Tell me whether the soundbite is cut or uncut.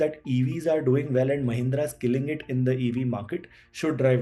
uncut